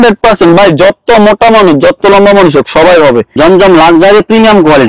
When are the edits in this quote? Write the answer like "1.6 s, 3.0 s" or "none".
3.3 s